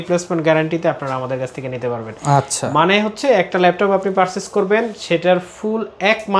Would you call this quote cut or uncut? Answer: uncut